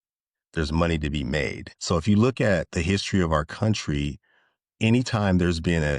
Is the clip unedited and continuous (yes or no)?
no